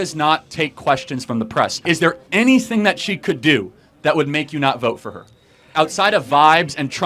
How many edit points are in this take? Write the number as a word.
two